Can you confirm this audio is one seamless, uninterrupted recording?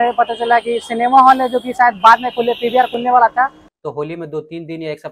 no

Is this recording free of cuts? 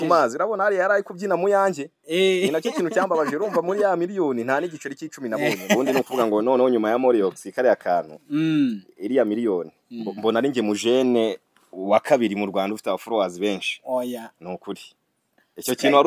no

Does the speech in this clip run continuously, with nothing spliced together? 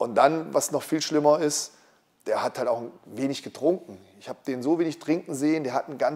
yes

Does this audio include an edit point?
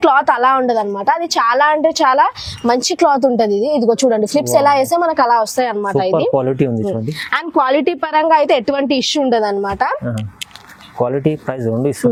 no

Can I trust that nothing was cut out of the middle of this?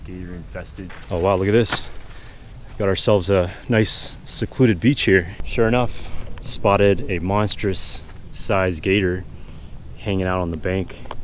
no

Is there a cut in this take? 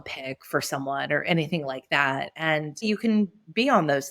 yes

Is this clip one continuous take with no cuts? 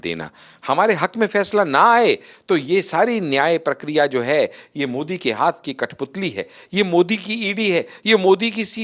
yes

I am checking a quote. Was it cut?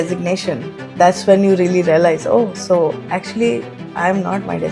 no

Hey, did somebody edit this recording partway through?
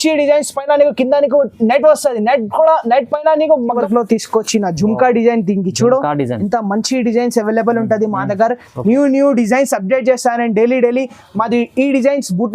yes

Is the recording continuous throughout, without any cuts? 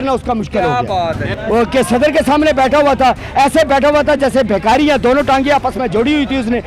no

